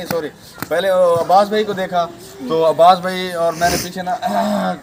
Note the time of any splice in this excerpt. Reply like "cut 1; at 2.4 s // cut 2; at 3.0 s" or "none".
none